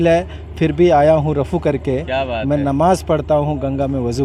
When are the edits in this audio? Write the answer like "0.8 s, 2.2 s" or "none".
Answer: none